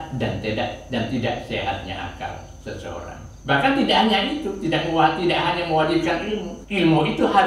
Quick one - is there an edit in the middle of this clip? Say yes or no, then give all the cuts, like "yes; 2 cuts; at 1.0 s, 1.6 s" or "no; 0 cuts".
yes; 2 cuts; at 3.3 s, 6.6 s